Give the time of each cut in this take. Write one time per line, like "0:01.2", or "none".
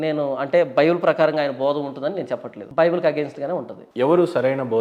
0:02.6
0:03.8